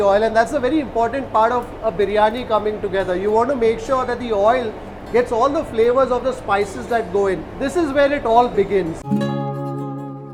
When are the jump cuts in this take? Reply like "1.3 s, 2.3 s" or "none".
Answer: 7.6 s, 9.0 s